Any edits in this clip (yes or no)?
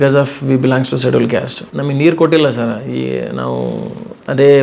yes